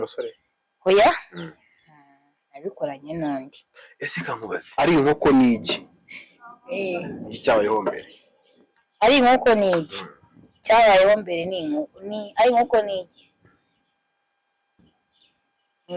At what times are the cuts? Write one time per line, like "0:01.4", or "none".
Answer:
0:04.7